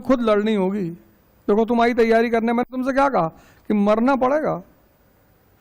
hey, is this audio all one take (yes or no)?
yes